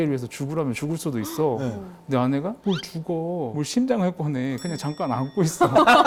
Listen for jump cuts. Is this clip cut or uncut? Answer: uncut